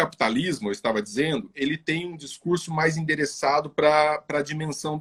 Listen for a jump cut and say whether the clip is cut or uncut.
uncut